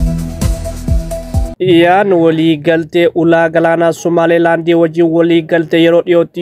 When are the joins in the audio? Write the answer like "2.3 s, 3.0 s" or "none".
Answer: 1.1 s